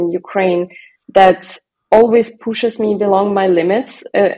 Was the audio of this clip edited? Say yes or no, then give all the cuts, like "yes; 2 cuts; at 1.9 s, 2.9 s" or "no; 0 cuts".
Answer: no; 0 cuts